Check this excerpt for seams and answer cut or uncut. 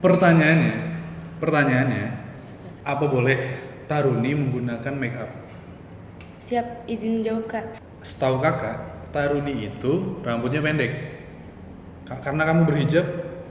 cut